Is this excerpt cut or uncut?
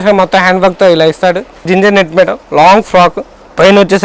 cut